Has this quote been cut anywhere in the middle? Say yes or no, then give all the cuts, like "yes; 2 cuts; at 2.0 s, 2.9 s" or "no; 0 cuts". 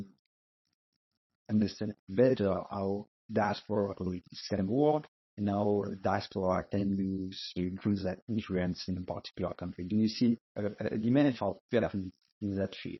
no; 0 cuts